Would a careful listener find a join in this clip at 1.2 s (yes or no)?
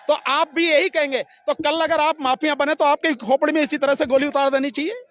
no